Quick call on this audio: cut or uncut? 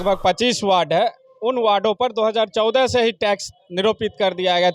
uncut